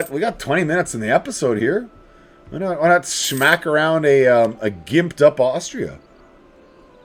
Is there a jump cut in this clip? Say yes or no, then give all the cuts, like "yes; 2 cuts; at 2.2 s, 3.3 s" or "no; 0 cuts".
no; 0 cuts